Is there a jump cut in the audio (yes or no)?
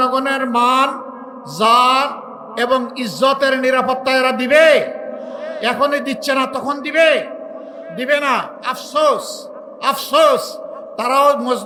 no